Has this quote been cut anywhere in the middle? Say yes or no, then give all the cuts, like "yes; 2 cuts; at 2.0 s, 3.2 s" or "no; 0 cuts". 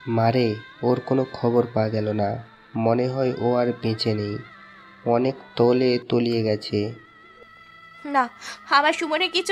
no; 0 cuts